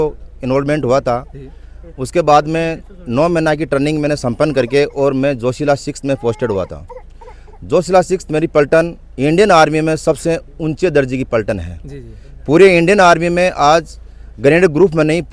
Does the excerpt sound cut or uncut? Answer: uncut